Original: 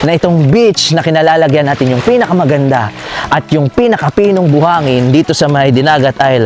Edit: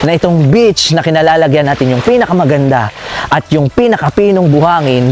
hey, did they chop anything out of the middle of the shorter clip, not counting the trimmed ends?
no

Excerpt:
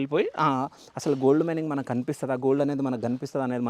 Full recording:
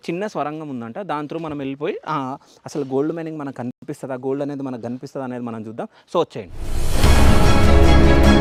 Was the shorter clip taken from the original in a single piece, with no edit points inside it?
no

